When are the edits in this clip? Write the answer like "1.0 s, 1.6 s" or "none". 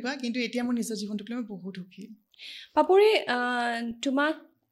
none